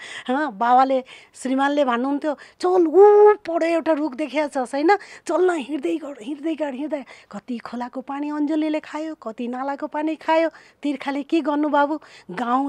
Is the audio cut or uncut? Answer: uncut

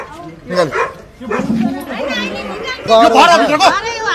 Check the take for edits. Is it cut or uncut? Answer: cut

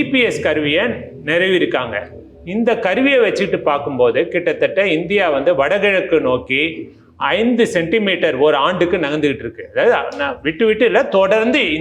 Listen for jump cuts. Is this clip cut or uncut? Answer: uncut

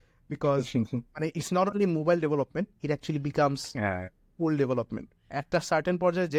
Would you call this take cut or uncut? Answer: uncut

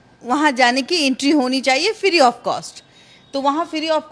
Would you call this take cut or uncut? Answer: uncut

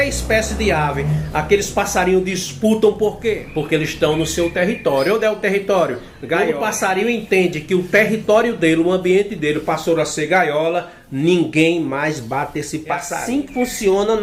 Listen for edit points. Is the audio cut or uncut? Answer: cut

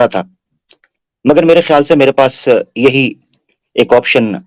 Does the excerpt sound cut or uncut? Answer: uncut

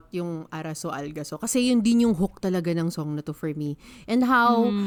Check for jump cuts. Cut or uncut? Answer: uncut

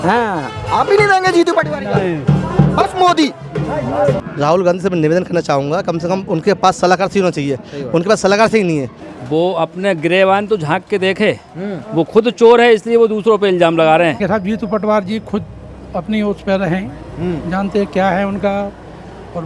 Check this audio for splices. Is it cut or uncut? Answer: cut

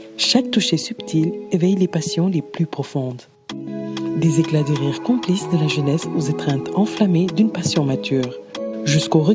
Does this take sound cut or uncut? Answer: uncut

